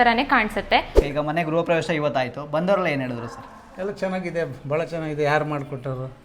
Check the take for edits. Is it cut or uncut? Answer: cut